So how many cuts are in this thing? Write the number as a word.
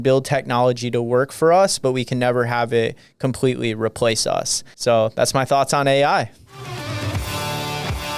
zero